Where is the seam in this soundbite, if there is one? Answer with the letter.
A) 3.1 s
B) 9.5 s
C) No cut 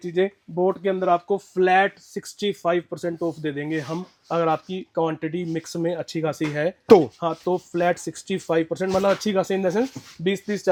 C